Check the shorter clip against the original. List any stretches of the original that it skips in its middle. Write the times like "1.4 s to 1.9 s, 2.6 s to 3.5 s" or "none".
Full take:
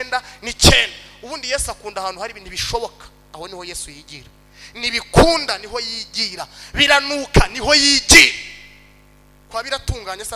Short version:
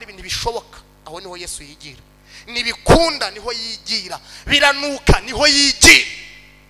none